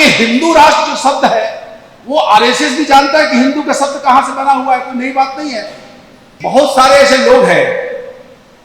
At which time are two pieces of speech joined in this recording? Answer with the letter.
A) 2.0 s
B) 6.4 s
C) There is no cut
B